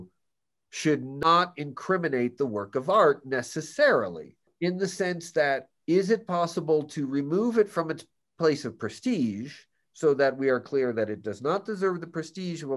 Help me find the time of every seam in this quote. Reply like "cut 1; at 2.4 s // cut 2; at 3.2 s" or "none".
cut 1; at 1.2 s // cut 2; at 4.5 s